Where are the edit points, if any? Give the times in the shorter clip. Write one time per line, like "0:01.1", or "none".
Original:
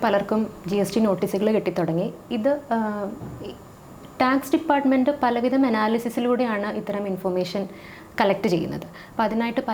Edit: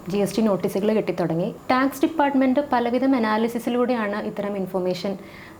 0:01.6